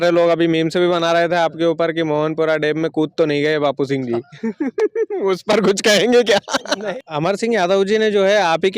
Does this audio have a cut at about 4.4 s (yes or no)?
no